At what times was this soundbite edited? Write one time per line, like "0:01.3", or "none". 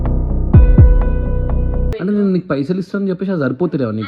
0:01.9